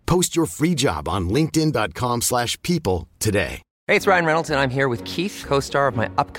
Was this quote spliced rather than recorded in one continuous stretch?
yes; 1 cut; at 3.7 s

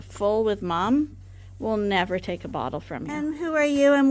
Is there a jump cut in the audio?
yes; 1 cut; at 3.0 s

